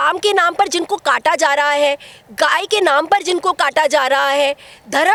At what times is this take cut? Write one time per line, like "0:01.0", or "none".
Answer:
none